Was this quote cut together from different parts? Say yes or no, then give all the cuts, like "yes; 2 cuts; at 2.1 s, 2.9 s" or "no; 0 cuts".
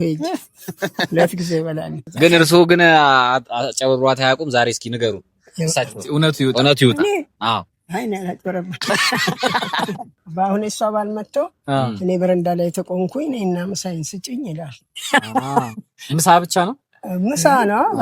yes; 2 cuts; at 2.0 s, 10.2 s